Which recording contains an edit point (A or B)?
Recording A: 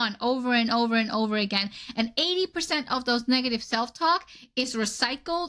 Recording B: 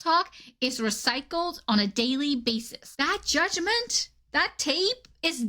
B